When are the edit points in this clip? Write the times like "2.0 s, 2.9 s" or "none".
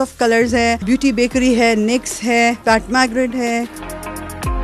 none